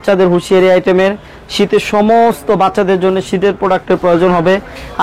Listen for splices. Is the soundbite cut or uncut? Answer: uncut